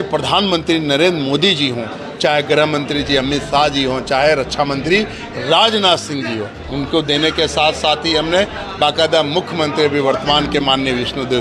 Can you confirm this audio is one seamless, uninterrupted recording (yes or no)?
yes